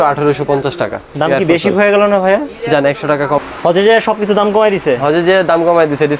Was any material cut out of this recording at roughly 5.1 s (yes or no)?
no